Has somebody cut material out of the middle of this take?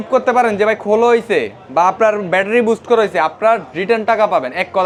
no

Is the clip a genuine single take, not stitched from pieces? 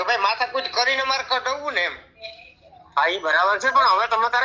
yes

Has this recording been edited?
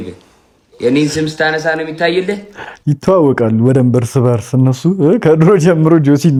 no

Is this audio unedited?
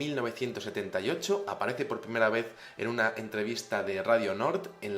no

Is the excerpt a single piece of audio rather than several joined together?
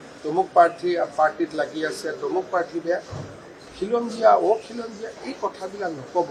yes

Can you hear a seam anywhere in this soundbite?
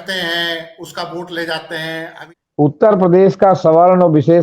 yes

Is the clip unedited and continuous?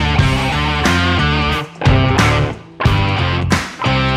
yes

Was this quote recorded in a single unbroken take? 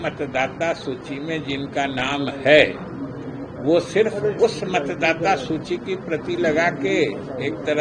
yes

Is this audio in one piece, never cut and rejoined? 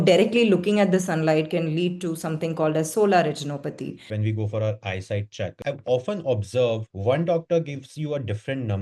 no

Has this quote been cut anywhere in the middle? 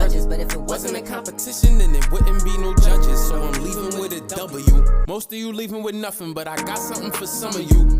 no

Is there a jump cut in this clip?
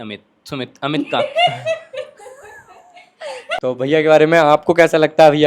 yes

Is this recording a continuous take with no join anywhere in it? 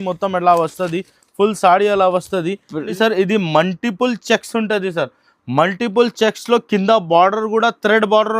no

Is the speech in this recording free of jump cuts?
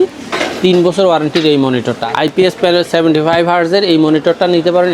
no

